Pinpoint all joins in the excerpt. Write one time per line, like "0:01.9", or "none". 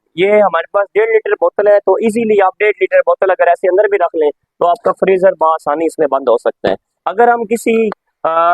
0:06.9